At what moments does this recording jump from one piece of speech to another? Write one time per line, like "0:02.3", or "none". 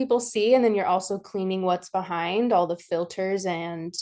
none